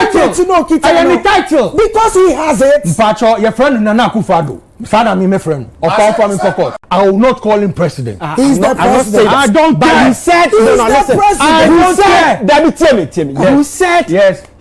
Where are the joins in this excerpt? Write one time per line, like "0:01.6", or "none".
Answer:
0:06.8

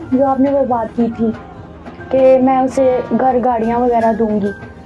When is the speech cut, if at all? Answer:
none

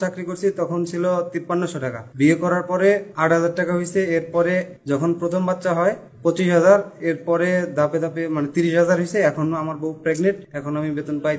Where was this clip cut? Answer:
0:01.6
0:03.1
0:04.7
0:06.1
0:10.1

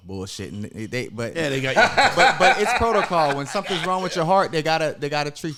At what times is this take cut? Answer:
none

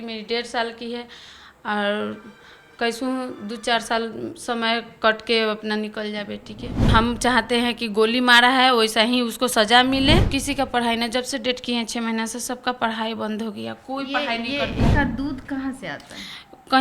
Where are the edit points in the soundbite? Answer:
0:06.9
0:10.3
0:14.9

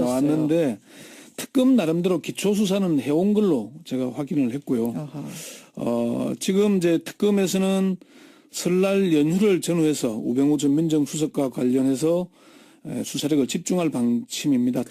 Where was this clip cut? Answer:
0:11.4

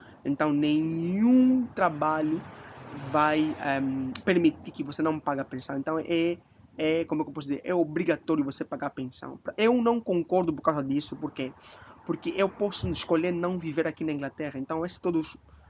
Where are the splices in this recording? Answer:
0:11.2

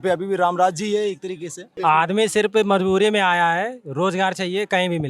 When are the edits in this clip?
0:01.6

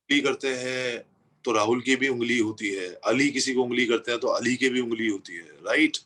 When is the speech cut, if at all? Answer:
none

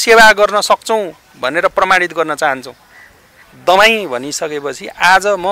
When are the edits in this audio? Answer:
0:03.4

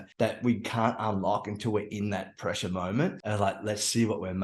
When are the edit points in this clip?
0:03.2

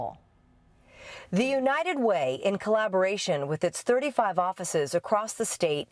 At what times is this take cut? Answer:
0:04.1

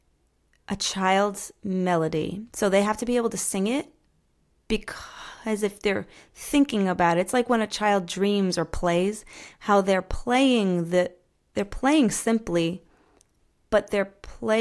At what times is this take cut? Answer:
none

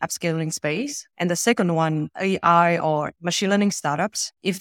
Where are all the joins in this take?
0:02.1

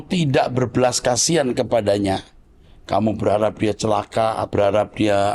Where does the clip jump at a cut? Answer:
0:04.4

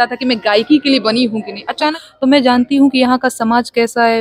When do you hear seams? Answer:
0:02.0

